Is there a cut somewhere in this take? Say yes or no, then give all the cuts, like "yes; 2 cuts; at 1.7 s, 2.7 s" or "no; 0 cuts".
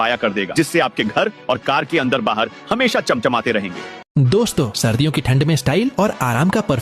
yes; 1 cut; at 4.0 s